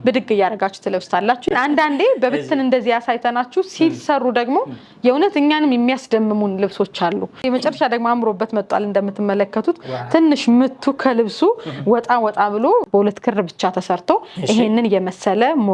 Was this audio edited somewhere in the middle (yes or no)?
yes